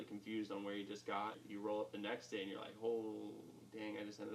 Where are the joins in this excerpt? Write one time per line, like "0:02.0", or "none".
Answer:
0:01.4